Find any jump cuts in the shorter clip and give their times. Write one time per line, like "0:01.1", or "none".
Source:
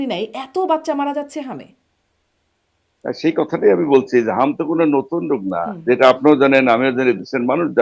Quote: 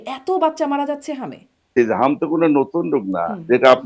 0:01.7

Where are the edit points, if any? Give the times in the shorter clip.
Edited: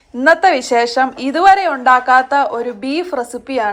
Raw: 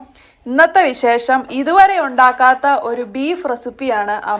none

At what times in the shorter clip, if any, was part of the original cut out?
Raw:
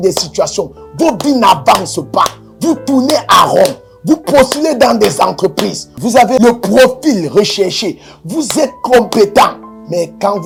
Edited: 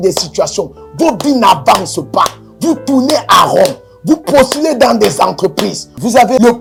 none

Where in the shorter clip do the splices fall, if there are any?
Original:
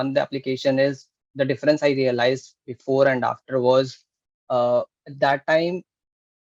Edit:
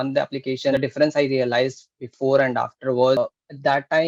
0:00.7
0:03.2

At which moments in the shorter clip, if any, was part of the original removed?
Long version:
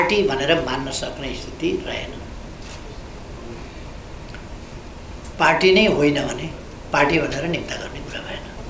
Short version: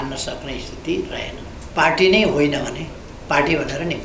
0:01.5

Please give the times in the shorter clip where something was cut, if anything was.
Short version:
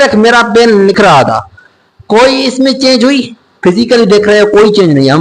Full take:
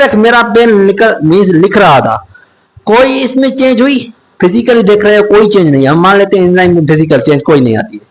0:01.0

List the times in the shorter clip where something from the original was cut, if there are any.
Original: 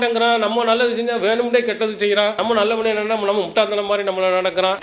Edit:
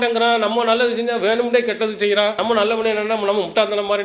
none

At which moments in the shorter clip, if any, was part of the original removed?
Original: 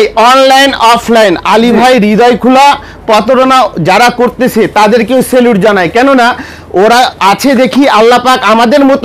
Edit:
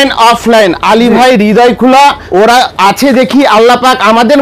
0:02.2

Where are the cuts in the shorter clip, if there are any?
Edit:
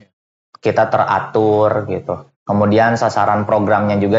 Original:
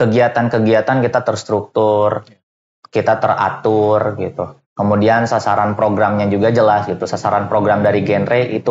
none

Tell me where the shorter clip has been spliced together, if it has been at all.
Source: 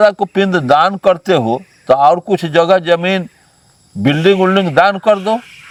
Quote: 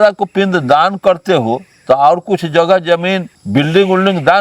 0:03.3

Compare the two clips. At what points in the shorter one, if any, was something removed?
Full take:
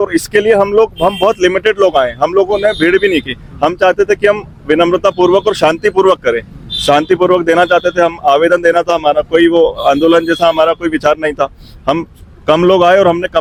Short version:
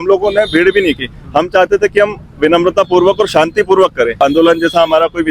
0:04.1

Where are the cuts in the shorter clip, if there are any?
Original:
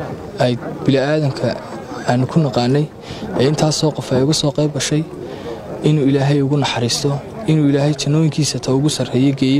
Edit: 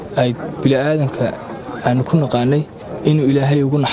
0:02.8

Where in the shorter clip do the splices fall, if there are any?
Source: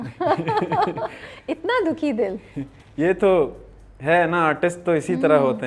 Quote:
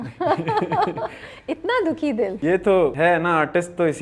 0:02.4
0:02.9

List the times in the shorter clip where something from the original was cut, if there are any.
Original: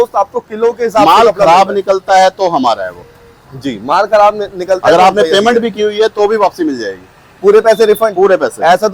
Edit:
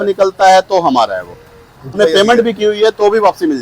0:02.0

